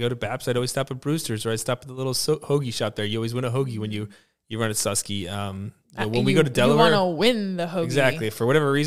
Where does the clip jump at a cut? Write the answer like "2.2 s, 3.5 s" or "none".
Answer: none